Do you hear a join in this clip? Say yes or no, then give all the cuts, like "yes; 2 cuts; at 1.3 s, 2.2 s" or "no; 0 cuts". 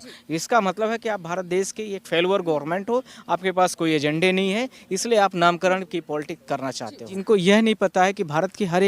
yes; 1 cut; at 7.1 s